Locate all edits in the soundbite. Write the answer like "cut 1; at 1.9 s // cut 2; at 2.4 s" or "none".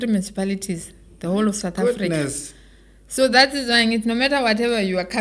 none